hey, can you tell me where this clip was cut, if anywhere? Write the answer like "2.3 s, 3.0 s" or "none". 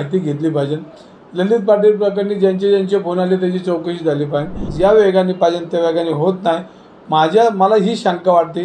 4.7 s